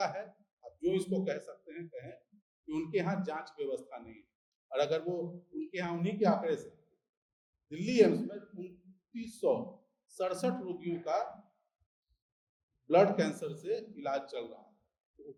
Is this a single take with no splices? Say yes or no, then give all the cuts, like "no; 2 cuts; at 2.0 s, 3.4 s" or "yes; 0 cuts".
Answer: yes; 0 cuts